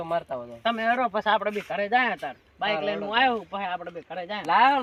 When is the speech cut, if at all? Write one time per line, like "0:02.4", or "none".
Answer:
none